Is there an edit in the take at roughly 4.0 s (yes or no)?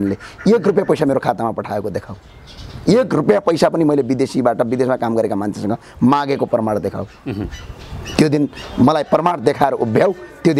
no